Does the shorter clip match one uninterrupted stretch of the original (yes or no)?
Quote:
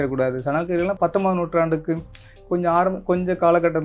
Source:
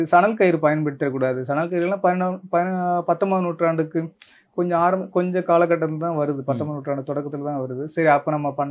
no